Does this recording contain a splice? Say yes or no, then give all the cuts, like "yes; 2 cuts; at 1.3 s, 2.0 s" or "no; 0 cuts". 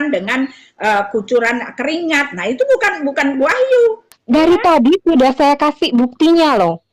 yes; 1 cut; at 4.1 s